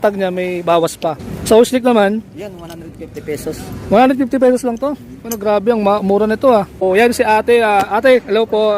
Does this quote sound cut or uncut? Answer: cut